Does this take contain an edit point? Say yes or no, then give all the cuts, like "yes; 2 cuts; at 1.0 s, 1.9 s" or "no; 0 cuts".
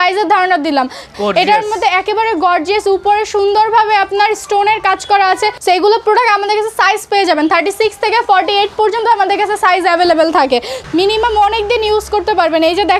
yes; 3 cuts; at 1.1 s, 5.6 s, 10.8 s